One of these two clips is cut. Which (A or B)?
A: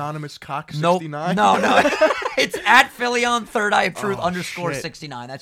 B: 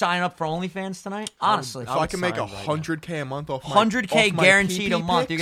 B